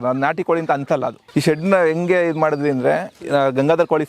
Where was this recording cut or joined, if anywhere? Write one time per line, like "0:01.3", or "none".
0:01.2